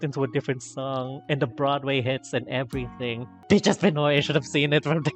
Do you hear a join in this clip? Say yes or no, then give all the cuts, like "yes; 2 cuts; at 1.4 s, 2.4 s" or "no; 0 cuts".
yes; 1 cut; at 3.3 s